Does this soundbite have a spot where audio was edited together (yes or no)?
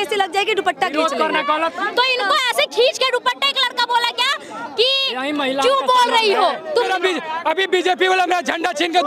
yes